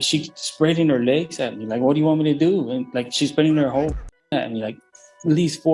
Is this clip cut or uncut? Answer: uncut